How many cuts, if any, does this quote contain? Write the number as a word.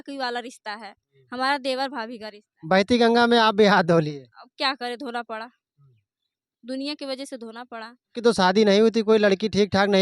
one